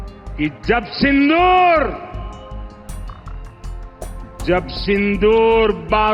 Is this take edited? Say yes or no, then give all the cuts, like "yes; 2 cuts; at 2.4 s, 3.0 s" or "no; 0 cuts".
yes; 2 cuts; at 2.2 s, 3.7 s